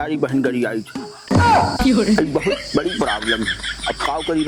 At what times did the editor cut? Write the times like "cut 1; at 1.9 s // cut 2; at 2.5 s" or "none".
none